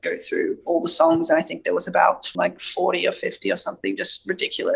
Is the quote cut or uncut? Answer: cut